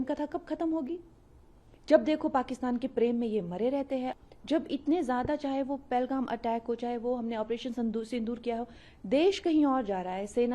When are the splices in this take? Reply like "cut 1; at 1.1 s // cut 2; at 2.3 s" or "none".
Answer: cut 1; at 4.1 s